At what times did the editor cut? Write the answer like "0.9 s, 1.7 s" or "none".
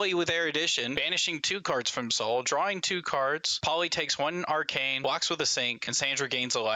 1.0 s, 3.5 s, 4.9 s, 5.8 s